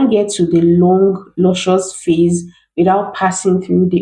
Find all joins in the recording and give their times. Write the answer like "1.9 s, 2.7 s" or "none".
none